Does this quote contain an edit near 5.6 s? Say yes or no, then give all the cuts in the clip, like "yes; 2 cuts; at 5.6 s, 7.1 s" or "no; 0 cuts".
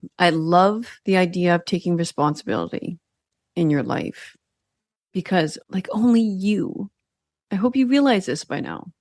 yes; 2 cuts; at 0.9 s, 5.6 s